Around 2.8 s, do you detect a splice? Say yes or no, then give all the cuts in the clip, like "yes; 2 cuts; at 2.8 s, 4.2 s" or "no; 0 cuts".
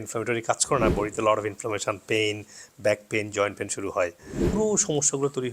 no; 1 cut; at 4.4 s